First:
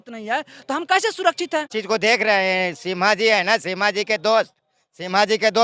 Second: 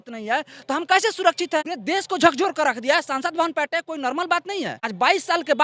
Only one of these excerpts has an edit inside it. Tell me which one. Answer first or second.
second